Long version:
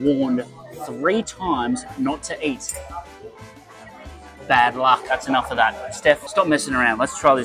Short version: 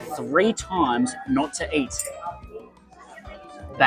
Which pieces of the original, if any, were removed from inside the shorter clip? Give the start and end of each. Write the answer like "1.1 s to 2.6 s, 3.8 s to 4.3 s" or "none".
none